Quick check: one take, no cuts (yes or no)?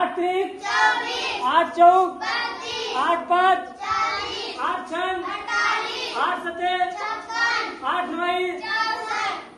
yes